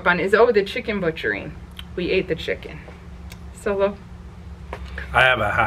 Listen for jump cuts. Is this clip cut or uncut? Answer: uncut